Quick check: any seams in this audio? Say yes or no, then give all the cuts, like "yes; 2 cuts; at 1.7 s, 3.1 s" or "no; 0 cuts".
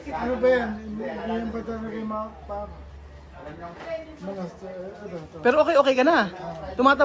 no; 0 cuts